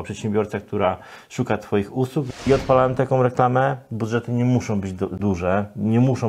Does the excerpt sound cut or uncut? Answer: cut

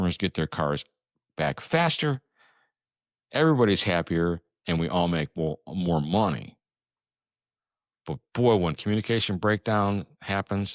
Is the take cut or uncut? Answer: uncut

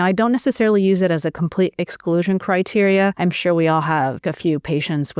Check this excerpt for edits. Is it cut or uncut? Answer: cut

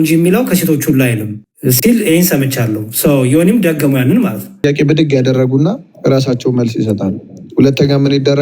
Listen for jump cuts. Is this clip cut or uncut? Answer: cut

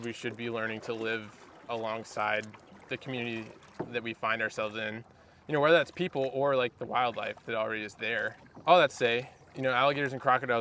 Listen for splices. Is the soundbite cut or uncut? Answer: uncut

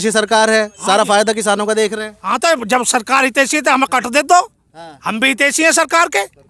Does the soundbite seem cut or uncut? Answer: uncut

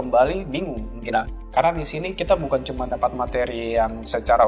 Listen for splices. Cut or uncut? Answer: cut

